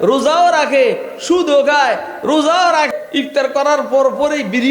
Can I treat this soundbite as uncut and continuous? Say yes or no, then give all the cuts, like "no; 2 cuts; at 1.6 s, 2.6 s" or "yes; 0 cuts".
no; 1 cut; at 2.9 s